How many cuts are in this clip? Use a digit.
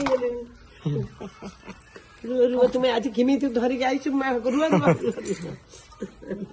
0